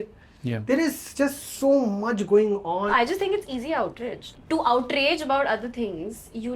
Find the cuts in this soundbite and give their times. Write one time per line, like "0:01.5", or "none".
0:02.9
0:04.3